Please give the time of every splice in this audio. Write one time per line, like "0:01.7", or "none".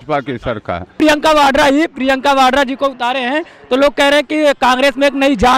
0:01.0